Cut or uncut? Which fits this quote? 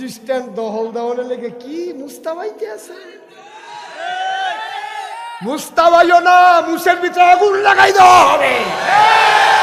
uncut